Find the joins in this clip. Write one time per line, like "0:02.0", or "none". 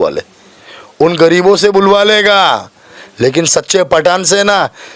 none